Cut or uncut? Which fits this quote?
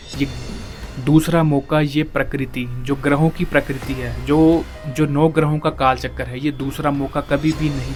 uncut